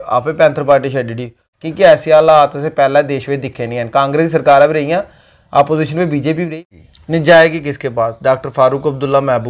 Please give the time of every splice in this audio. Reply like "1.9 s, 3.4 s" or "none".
1.5 s, 6.5 s